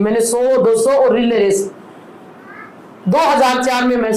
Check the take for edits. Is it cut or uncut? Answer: uncut